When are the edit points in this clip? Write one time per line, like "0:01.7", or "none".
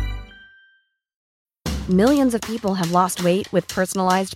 0:01.1